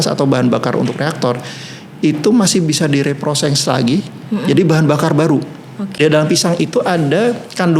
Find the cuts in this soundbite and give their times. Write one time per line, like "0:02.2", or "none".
0:06.0